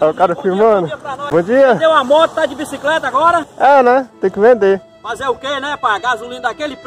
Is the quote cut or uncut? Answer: cut